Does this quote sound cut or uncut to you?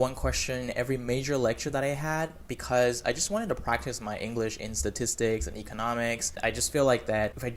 cut